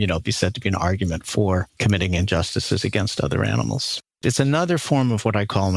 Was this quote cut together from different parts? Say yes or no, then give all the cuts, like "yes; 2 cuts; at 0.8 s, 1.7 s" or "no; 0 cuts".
yes; 2 cuts; at 1.7 s, 4.0 s